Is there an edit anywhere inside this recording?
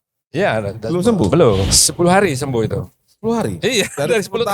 yes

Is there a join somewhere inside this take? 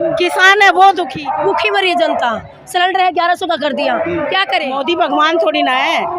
yes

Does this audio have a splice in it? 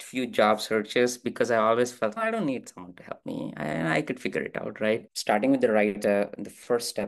yes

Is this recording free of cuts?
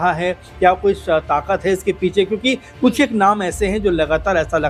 yes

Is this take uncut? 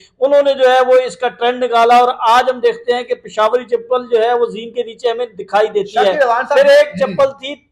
yes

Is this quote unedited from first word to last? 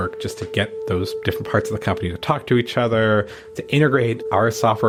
yes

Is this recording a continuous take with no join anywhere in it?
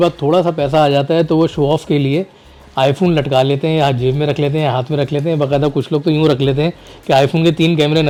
yes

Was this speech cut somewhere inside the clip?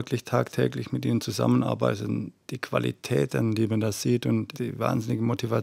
yes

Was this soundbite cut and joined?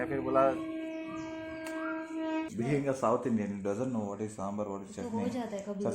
yes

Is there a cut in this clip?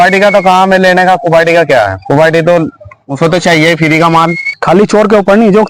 yes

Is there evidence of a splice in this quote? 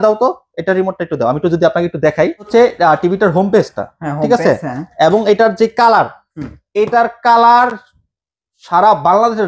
yes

